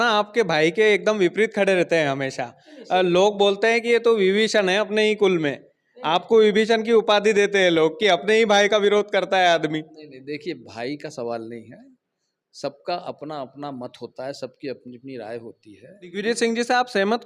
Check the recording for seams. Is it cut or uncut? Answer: cut